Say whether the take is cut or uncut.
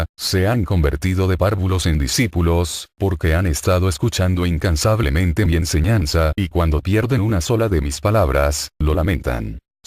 cut